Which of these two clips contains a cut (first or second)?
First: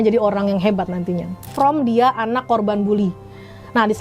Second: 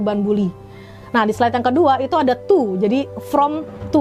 first